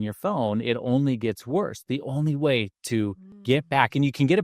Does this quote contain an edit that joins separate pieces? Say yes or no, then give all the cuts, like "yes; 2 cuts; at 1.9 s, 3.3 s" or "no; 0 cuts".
yes; 1 cut; at 3.3 s